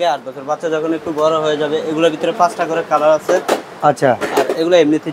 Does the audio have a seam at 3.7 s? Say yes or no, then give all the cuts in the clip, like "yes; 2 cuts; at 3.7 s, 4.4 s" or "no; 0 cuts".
no; 0 cuts